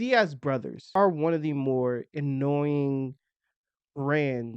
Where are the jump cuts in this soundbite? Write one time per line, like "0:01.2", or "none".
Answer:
0:00.9

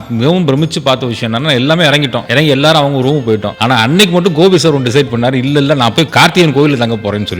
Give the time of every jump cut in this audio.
0:02.2
0:03.5

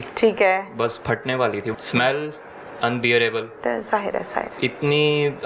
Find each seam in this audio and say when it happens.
0:01.7
0:04.5

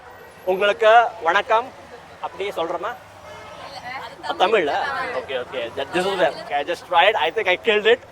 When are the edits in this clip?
0:06.4

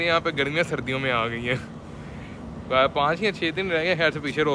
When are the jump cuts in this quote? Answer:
none

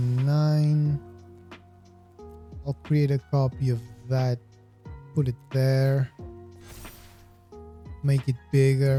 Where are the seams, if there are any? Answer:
none

